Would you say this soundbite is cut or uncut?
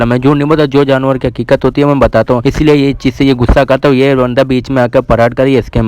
cut